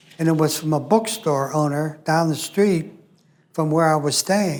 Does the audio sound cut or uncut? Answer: uncut